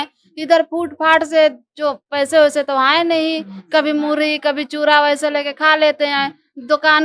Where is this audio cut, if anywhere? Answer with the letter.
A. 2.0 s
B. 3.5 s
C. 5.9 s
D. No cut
D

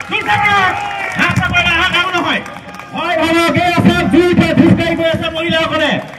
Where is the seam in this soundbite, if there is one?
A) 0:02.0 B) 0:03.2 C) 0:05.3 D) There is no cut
A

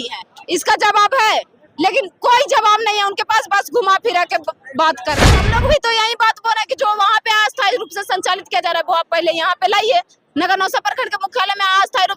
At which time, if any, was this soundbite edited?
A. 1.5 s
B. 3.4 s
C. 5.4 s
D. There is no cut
C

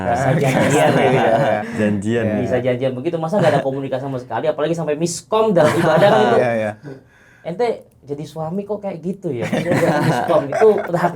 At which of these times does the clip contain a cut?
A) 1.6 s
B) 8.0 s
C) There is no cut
A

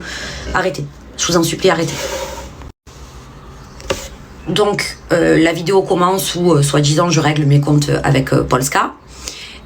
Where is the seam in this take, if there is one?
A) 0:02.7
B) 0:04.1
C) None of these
A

